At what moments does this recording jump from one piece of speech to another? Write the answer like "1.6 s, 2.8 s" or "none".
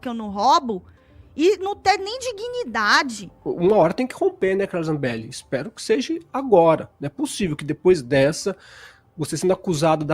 3.2 s